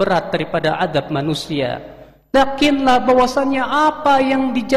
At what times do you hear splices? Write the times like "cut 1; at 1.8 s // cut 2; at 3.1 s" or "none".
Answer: none